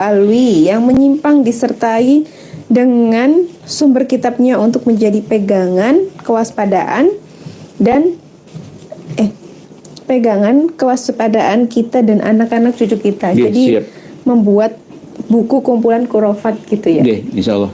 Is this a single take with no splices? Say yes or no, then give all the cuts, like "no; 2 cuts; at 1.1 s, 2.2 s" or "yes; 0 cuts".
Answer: yes; 0 cuts